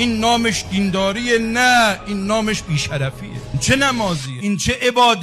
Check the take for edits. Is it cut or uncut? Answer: cut